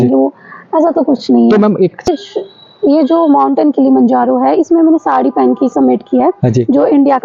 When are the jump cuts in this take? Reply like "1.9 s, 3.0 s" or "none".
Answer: 2.1 s